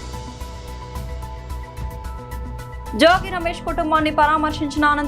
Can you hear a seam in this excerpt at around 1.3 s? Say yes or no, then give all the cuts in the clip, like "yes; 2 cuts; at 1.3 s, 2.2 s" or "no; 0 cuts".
yes; 1 cut; at 1.3 s